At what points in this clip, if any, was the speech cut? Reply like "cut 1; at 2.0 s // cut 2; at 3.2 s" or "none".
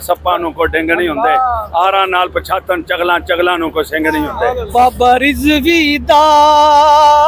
cut 1; at 4.6 s

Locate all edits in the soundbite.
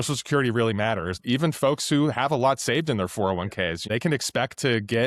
cut 1; at 1.2 s // cut 2; at 3.9 s

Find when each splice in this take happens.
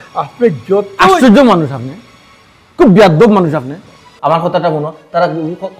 cut 1; at 4.1 s

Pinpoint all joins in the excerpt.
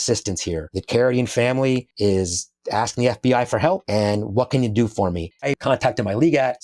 cut 1; at 1.9 s // cut 2; at 5.4 s

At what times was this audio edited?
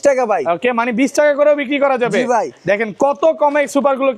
none

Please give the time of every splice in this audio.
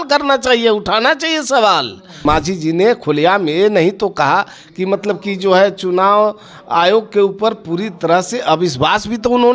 cut 1; at 2.2 s

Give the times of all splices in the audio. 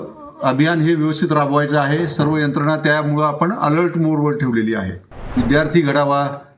cut 1; at 5.3 s

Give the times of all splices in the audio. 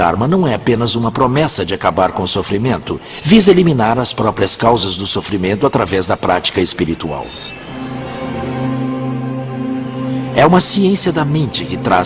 cut 1; at 9.9 s

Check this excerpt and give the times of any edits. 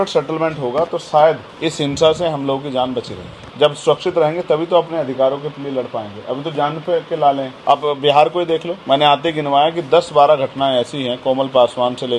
none

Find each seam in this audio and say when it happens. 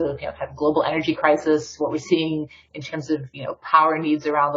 none

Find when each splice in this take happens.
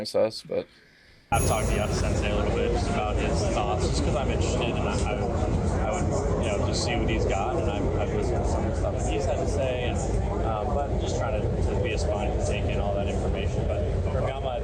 cut 1; at 1.3 s

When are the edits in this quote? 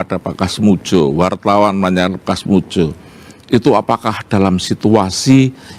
none

